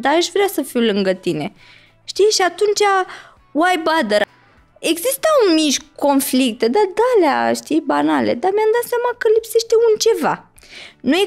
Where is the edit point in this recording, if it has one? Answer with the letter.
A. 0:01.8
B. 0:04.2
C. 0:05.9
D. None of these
B